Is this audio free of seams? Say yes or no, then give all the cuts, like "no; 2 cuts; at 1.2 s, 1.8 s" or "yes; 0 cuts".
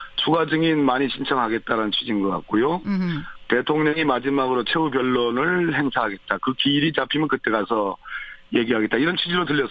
yes; 0 cuts